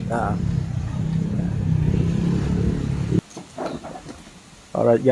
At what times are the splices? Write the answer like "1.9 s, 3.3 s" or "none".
3.2 s